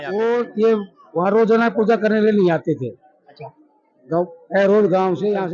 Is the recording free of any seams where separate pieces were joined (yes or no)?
yes